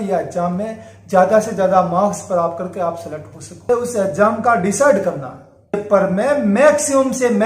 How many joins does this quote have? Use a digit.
2